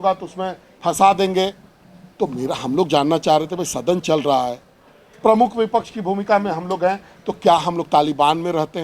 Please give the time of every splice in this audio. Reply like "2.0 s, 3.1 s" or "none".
none